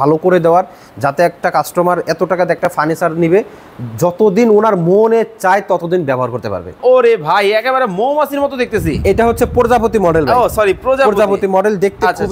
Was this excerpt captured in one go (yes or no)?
no